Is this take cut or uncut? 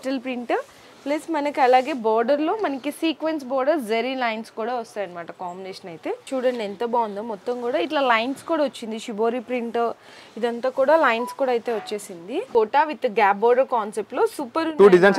cut